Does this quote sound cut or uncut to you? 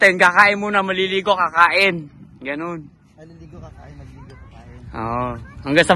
uncut